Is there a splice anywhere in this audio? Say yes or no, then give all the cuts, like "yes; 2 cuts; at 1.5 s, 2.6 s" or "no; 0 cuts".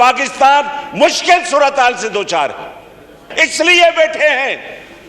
yes; 1 cut; at 3.2 s